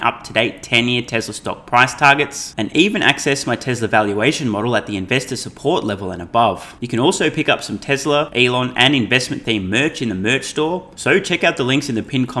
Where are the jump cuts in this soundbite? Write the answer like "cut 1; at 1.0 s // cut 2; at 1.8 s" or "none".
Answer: cut 1; at 6.8 s // cut 2; at 8.3 s // cut 3; at 10.9 s